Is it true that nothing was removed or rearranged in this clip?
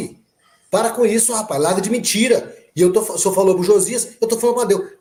yes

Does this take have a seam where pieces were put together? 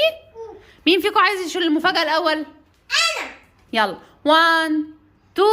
yes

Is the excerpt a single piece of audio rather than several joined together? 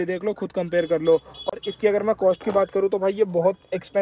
yes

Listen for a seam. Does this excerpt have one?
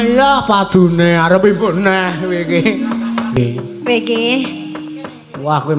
yes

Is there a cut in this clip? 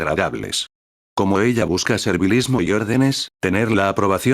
no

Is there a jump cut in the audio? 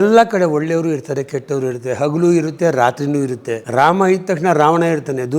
yes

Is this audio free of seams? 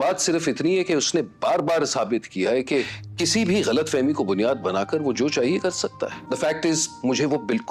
yes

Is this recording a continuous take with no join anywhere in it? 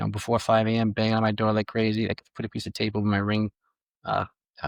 yes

